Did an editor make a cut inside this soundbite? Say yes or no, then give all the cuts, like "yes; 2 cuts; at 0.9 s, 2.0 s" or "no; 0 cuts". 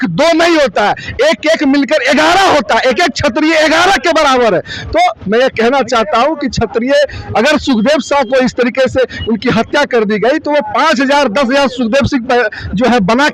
no; 0 cuts